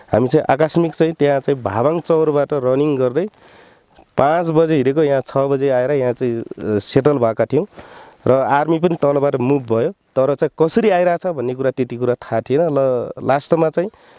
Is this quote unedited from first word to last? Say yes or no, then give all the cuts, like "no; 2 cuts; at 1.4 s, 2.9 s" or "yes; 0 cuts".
yes; 0 cuts